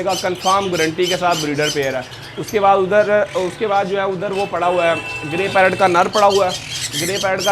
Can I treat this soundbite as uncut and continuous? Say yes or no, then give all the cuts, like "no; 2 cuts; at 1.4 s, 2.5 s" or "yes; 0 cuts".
yes; 0 cuts